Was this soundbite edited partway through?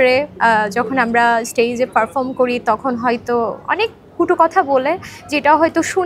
no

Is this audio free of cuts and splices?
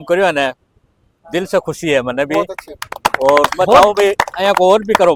yes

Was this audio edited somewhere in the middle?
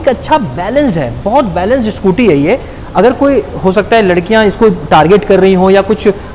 no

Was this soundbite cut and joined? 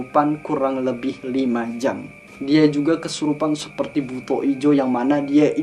yes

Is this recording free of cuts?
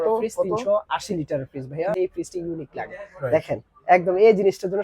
no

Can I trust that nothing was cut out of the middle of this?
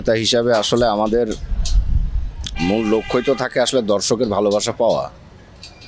yes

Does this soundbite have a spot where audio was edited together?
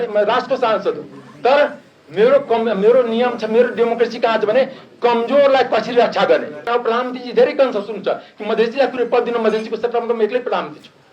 yes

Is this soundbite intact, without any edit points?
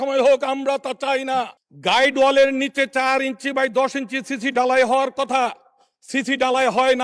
no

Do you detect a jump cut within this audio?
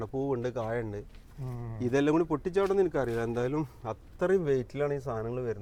no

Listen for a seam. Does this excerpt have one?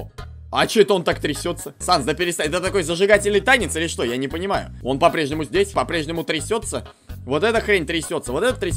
yes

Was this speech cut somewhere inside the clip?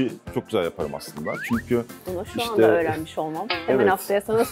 no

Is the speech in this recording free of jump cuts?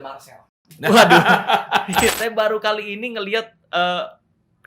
no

